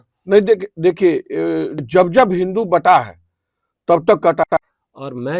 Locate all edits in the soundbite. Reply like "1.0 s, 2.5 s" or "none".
1.8 s, 4.4 s